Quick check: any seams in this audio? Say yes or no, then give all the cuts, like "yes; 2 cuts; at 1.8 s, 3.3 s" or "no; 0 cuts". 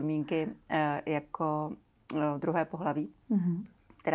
no; 0 cuts